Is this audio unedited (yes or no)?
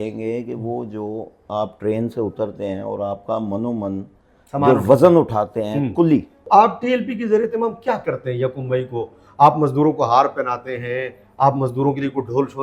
no